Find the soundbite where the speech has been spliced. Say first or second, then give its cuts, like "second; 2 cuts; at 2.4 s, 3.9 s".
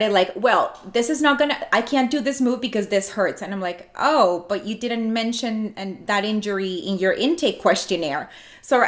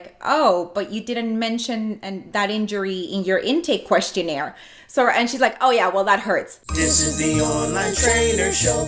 second; 1 cut; at 6.6 s